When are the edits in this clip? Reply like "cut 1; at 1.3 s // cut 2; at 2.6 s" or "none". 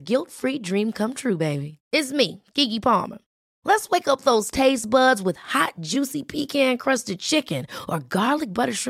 none